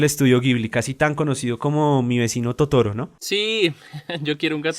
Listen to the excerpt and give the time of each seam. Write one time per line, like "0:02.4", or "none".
none